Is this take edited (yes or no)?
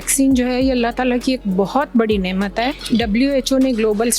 yes